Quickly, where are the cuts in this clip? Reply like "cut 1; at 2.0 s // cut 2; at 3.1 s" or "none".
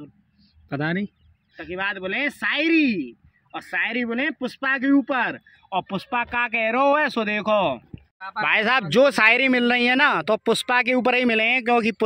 cut 1; at 8.0 s